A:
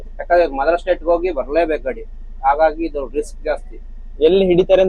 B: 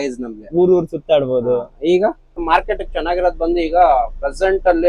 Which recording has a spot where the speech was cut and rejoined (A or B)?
B